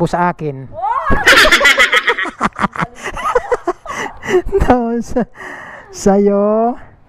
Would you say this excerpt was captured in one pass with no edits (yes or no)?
yes